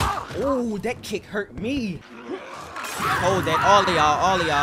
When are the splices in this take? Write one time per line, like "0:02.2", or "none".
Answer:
0:02.1